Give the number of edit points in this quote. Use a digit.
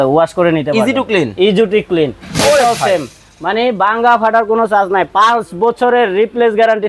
0